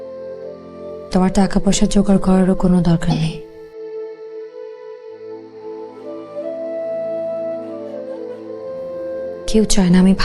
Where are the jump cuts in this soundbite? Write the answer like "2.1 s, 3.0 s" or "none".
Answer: none